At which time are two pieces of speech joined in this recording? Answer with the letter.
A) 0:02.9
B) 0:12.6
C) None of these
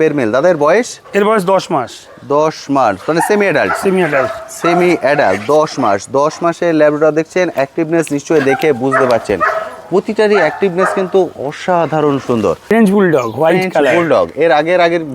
B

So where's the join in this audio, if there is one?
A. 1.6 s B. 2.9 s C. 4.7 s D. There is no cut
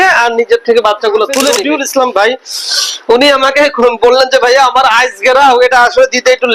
A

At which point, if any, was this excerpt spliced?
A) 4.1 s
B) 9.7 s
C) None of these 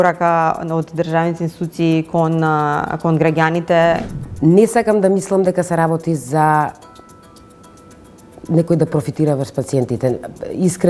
A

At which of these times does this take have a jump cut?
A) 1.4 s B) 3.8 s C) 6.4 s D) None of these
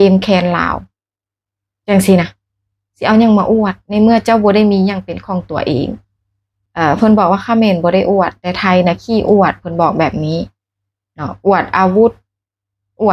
C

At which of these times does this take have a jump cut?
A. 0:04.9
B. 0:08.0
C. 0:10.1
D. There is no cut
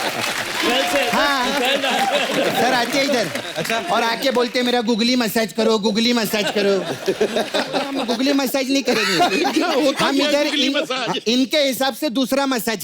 B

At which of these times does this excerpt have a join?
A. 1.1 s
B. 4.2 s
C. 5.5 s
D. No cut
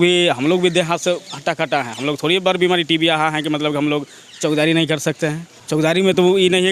C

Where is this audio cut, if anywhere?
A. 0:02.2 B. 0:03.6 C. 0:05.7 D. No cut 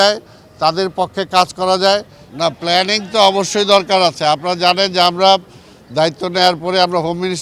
A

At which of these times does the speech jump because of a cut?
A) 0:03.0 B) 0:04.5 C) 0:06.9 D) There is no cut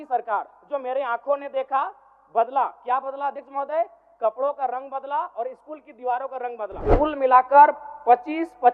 C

